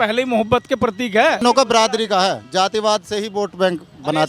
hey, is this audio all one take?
no; 1 cut; at 1.4 s

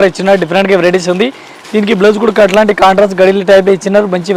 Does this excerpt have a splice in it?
no; 0 cuts

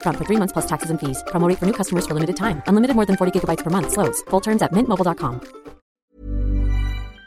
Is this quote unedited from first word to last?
no; 1 cut; at 5.9 s

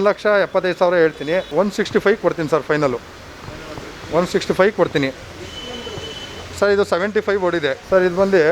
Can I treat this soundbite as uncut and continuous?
yes; 0 cuts

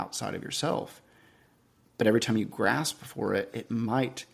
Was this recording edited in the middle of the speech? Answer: no; 0 cuts

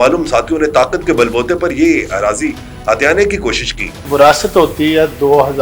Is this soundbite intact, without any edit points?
no; 1 cut; at 4.0 s

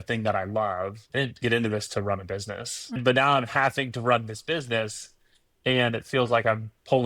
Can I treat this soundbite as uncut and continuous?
no; 2 cuts; at 1.0 s, 3.0 s

